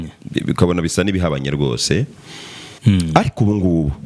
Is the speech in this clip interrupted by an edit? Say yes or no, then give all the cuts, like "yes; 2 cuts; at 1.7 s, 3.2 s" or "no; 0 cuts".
yes; 1 cut; at 2.7 s